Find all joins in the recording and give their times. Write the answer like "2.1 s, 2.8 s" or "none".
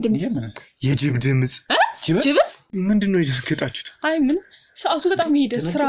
2.6 s